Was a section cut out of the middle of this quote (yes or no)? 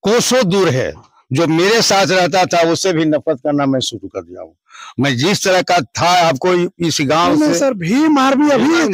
no